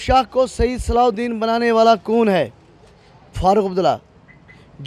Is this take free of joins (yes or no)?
yes